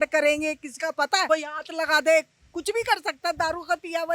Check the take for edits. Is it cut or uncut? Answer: cut